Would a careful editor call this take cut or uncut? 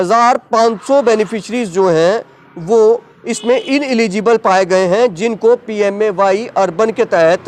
uncut